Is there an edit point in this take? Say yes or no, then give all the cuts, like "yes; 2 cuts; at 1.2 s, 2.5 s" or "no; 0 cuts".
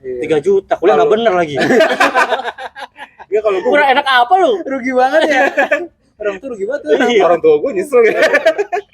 no; 0 cuts